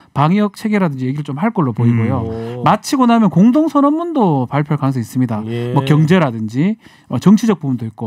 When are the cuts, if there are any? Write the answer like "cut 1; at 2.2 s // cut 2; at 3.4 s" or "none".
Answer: none